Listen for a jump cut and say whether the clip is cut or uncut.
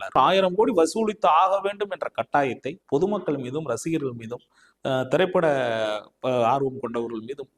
uncut